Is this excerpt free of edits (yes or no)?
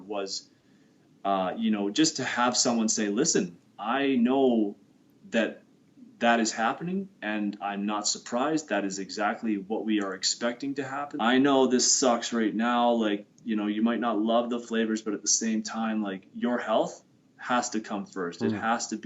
no